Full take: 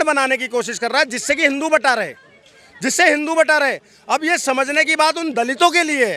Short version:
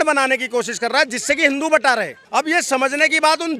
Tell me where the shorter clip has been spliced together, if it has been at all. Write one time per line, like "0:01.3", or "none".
0:02.2